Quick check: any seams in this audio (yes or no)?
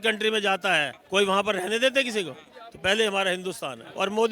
no